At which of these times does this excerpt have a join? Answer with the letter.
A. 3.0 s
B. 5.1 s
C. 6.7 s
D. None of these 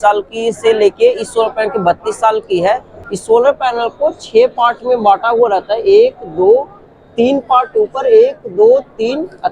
A